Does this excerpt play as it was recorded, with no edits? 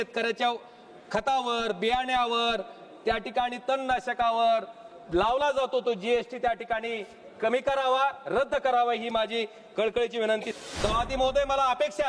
no; 1 cut; at 10.5 s

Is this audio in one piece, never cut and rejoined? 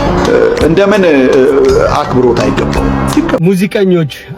no; 1 cut; at 3.4 s

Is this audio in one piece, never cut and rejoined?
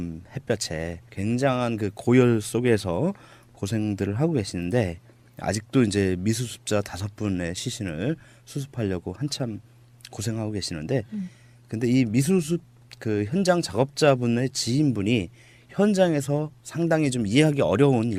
yes; 0 cuts

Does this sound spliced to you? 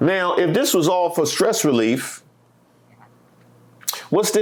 no; 0 cuts

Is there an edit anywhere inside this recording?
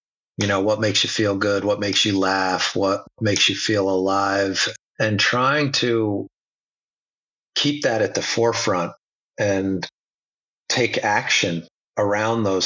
yes; 2 cuts; at 3.1 s, 4.6 s

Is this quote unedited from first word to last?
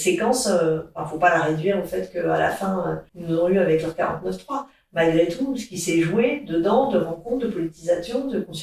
no; 1 cut; at 3.1 s

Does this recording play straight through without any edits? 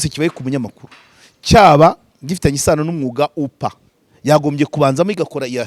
yes; 0 cuts

